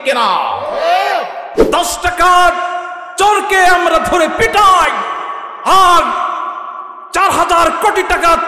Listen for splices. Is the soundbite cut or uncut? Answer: cut